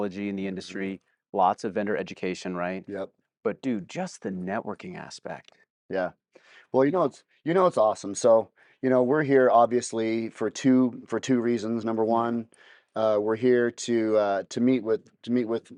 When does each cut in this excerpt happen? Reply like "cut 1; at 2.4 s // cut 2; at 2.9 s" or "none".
none